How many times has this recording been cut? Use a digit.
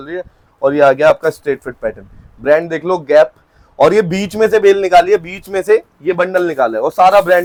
0